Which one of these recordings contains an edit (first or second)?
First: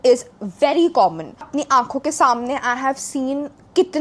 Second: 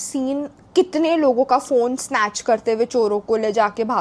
first